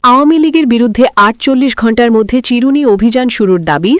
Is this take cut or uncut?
uncut